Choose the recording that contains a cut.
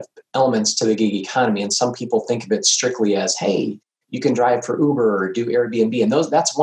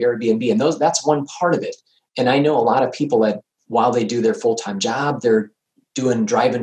second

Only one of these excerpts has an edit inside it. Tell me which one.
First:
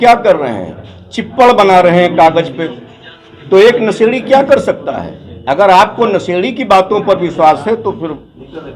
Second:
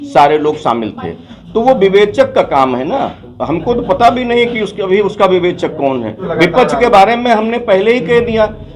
second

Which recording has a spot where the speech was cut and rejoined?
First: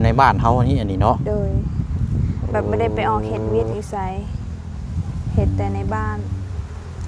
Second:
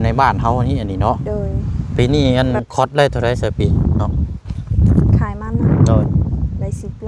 second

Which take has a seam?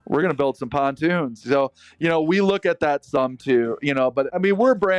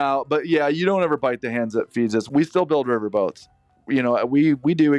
second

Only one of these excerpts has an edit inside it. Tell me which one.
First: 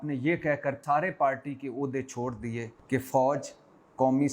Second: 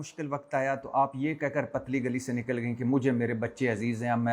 first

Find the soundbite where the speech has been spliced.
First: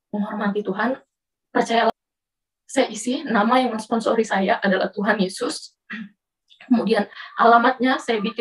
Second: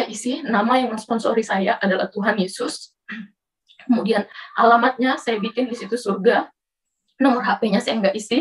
first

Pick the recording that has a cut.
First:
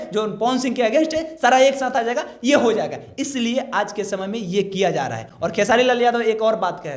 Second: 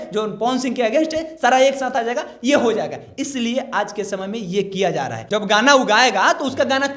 second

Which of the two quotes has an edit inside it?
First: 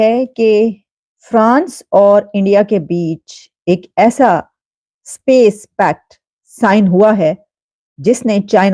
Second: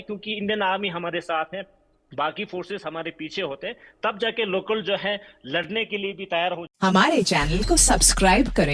second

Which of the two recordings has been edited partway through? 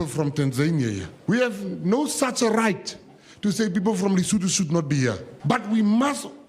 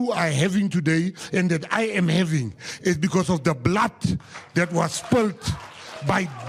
first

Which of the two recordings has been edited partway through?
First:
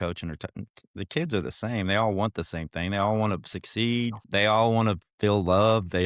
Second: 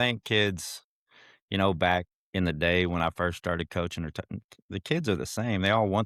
first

